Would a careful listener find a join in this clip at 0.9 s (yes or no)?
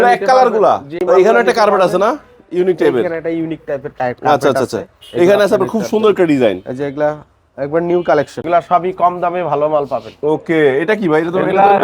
yes